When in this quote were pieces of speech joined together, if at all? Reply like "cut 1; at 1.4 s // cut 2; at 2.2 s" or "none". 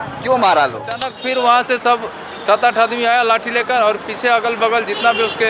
cut 1; at 1.1 s